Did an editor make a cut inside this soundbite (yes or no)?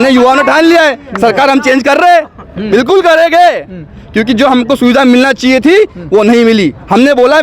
no